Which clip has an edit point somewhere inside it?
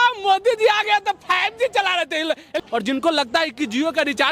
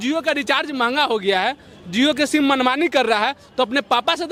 first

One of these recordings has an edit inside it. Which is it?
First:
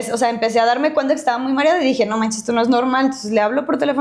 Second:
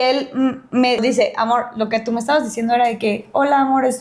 second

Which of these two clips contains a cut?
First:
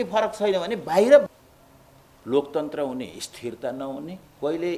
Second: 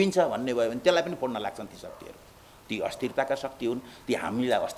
first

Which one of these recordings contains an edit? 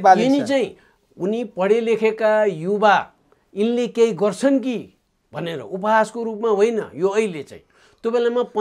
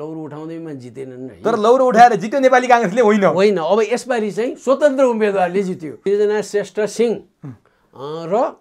second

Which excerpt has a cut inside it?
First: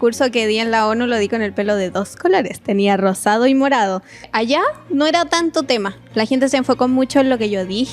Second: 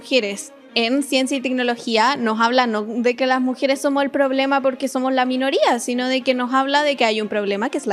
first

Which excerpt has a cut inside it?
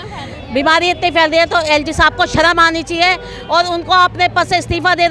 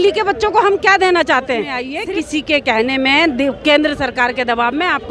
second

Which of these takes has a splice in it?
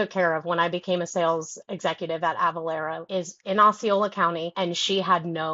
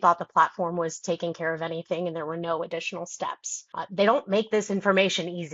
first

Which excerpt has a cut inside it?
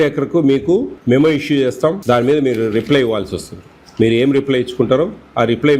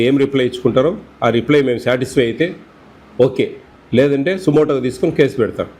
first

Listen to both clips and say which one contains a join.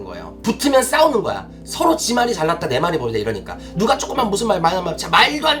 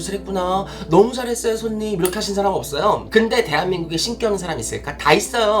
second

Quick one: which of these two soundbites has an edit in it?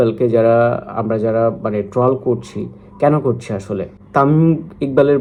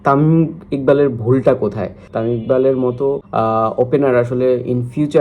second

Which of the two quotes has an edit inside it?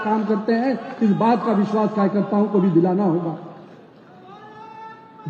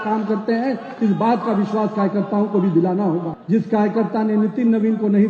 second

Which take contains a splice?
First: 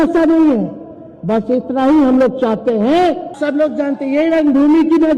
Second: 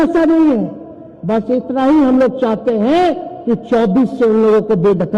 first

